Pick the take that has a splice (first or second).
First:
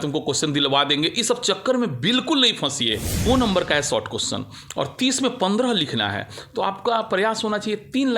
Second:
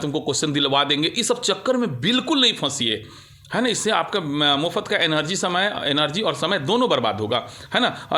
first